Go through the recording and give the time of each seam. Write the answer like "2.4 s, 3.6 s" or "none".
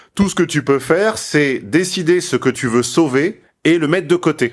2.6 s, 3.5 s